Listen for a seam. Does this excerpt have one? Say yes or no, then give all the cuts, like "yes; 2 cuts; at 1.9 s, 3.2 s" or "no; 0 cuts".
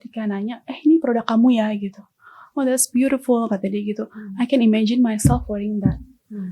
no; 0 cuts